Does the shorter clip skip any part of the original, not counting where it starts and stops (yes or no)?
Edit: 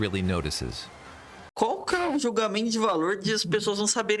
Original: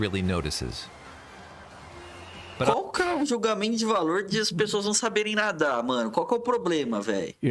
yes